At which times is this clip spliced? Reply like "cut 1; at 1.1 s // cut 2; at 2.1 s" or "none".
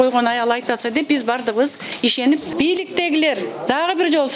cut 1; at 2.5 s

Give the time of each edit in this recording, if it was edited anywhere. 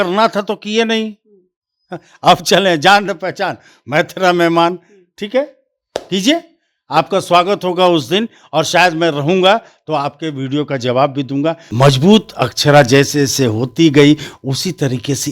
cut 1; at 11.6 s

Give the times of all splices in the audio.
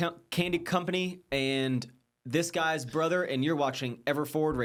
none

